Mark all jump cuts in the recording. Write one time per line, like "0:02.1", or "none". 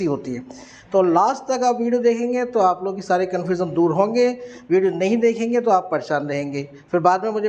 none